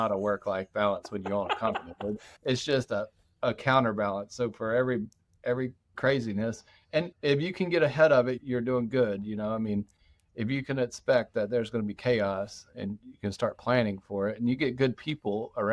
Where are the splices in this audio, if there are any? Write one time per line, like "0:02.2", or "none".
0:02.3
0:07.1
0:08.4